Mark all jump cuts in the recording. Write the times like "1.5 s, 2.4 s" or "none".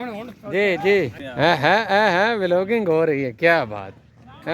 1.2 s